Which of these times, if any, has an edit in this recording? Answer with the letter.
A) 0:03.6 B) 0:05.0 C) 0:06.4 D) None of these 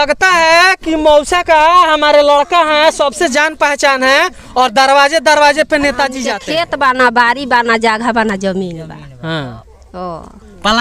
C